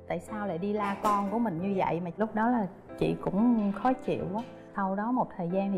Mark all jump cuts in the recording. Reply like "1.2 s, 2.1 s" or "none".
2.1 s, 4.6 s